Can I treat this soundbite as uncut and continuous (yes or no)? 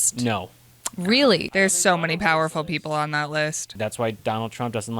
no